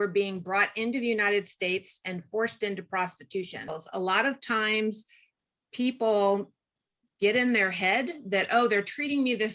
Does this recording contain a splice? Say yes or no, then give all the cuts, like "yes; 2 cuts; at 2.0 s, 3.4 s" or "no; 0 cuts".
yes; 1 cut; at 3.8 s